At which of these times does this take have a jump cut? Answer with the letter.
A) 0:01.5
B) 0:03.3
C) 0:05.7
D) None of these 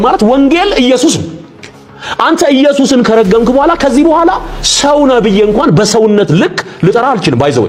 D